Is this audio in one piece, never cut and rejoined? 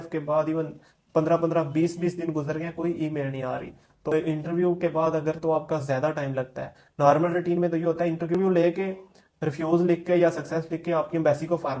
no; 2 cuts; at 4.1 s, 8.4 s

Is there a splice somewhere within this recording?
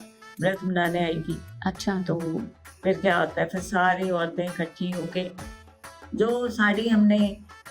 yes; 1 cut; at 5.6 s

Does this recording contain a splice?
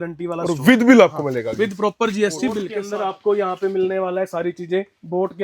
yes; 1 cut; at 2.8 s

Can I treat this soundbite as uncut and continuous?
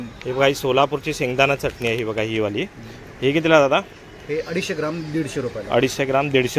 yes; 0 cuts

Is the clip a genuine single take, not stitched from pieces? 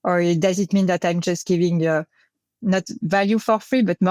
yes; 0 cuts

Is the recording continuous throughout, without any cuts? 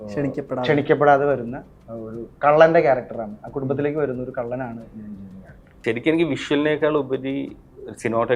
no; 1 cut; at 5.7 s

